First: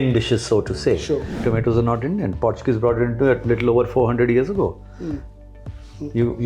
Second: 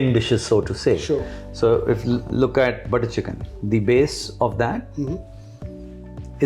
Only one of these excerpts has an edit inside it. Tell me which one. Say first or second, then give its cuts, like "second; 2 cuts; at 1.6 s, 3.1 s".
first; 1 cut; at 1.3 s